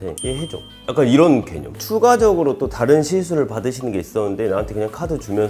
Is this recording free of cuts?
yes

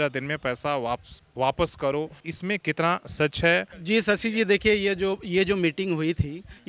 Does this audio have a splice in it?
yes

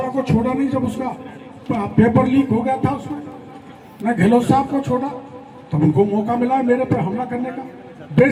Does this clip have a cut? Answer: no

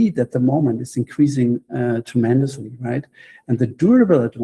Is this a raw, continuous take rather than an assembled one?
yes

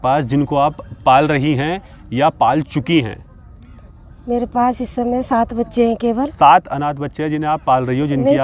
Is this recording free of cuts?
yes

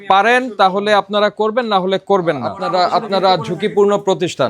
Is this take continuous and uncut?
no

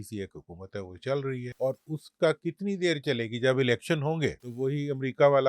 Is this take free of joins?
no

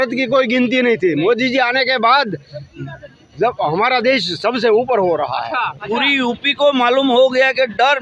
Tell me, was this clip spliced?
yes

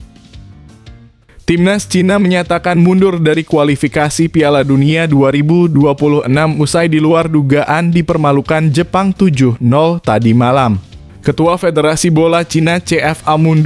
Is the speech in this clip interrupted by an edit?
yes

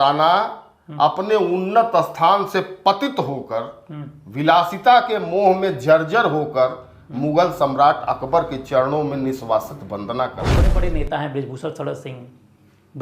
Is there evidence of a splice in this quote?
yes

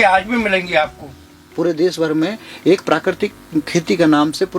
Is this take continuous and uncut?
no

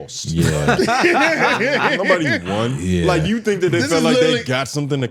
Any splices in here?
no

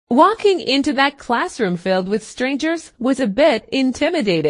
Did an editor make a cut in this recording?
no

